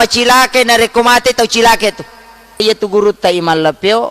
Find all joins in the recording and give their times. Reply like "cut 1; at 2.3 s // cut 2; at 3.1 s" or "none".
cut 1; at 2.6 s